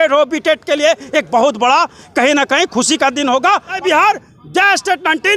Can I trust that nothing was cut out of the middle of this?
no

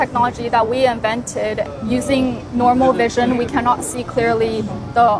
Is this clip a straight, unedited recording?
no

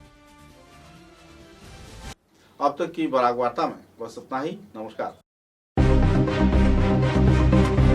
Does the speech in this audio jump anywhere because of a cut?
no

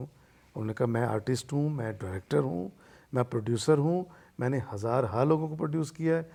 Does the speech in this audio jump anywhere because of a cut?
no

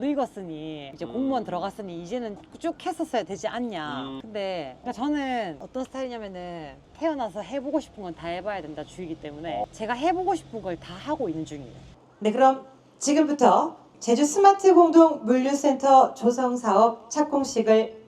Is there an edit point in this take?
yes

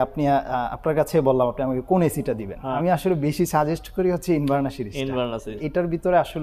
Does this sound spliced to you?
yes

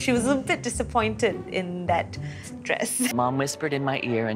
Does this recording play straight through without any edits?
no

